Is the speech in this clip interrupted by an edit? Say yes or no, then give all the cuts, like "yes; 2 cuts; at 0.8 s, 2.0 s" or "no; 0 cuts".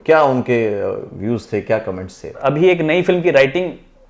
yes; 1 cut; at 2.4 s